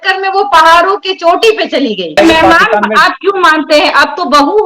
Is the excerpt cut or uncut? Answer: cut